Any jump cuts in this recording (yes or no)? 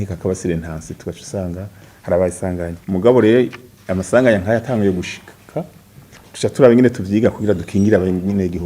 yes